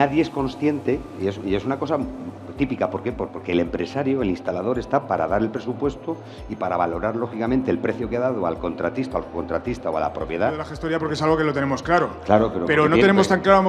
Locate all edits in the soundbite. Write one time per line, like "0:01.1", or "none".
0:10.7

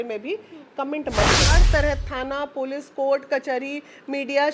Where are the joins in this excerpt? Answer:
0:01.5

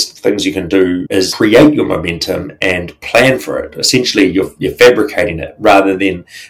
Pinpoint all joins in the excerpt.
0:01.2

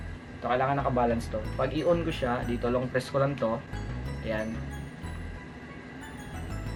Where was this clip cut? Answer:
none

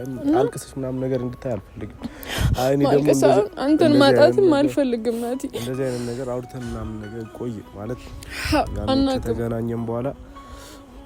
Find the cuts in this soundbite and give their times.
none

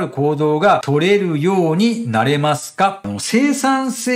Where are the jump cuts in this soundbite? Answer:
0:00.8
0:03.1

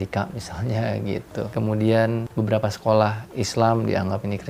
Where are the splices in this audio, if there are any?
0:01.5
0:02.3

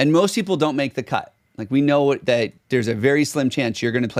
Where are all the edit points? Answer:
none

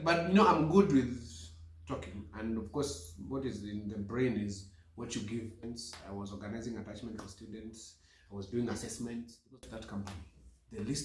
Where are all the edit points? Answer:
0:05.6
0:09.6

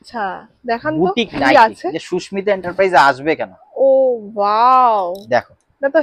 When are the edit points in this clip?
none

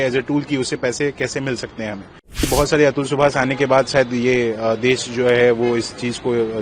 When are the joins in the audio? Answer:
0:02.5

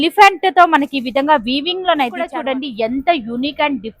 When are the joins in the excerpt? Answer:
0:02.3

